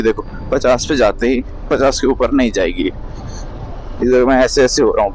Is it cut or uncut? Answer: uncut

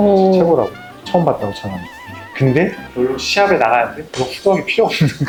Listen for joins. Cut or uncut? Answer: uncut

